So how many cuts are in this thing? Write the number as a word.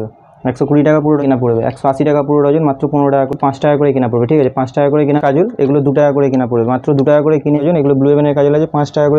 four